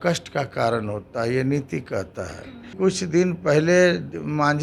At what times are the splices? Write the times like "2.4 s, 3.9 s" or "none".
2.7 s